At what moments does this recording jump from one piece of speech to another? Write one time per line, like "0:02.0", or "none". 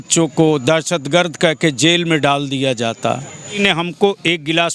0:03.5